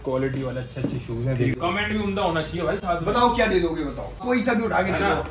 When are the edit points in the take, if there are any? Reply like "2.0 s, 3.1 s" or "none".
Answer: 1.5 s, 4.2 s